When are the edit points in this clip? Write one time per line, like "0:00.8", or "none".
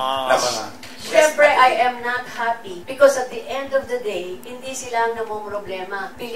none